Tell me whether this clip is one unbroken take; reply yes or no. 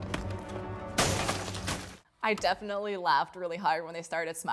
yes